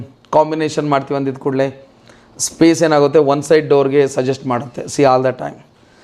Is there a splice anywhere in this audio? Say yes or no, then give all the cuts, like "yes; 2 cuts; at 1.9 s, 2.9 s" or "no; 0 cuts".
no; 0 cuts